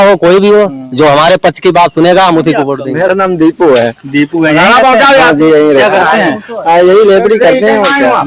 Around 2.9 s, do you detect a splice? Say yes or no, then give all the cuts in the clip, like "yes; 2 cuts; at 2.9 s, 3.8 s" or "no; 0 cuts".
no; 0 cuts